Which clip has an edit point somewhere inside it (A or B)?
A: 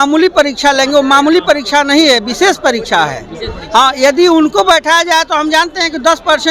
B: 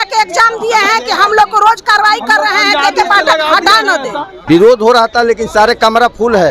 B